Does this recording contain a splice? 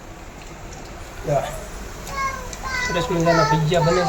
no; 0 cuts

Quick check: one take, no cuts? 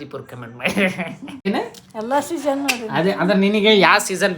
no; 1 cut; at 1.5 s

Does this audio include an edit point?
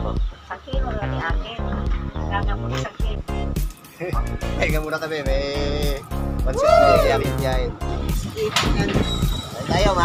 no; 0 cuts

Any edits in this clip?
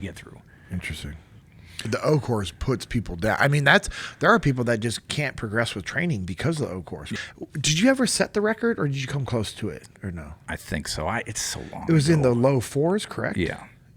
yes; 3 cuts; at 1.9 s, 7.1 s, 10.0 s

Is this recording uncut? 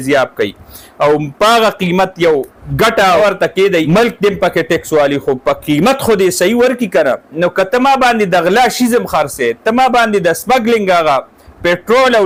yes; 0 cuts

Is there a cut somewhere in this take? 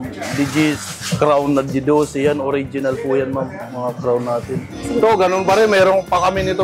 yes; 2 cuts; at 0.9 s, 4.8 s

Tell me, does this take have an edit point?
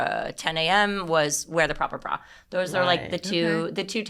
no; 0 cuts

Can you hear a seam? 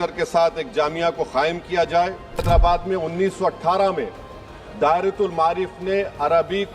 yes; 1 cut; at 2.4 s

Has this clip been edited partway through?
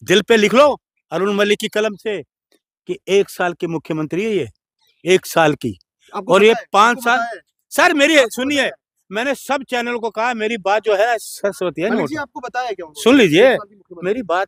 no; 0 cuts

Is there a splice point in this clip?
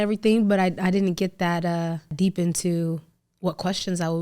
yes; 1 cut; at 2.1 s

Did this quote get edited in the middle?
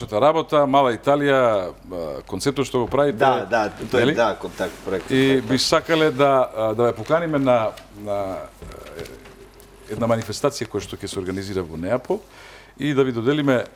no; 0 cuts

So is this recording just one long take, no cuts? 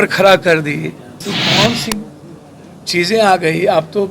no; 1 cut; at 1.2 s

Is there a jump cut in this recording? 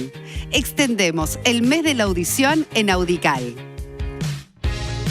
yes; 1 cut; at 3.6 s

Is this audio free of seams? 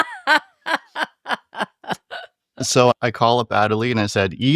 no; 1 cut; at 2.9 s

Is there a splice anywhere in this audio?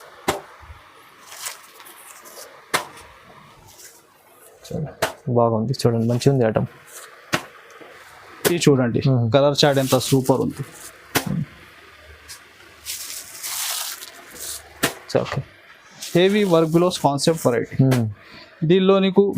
yes; 1 cut; at 7.8 s

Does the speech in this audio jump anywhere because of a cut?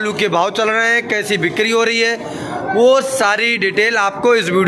no; 0 cuts

